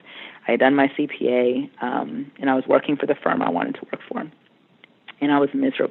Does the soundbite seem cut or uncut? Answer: uncut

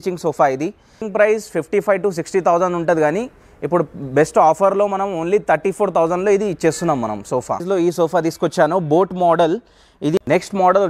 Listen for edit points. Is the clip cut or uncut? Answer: cut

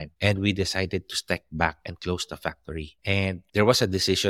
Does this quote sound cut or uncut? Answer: uncut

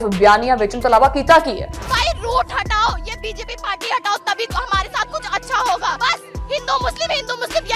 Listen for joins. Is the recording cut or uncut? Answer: uncut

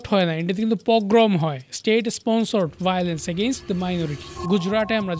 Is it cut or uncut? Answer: cut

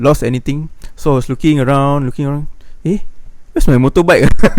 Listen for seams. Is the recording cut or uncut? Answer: uncut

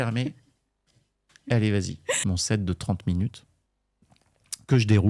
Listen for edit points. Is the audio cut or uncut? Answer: cut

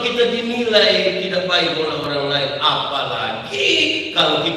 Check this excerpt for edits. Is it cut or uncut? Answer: uncut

